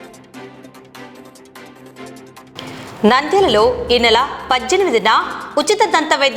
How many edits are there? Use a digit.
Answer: 1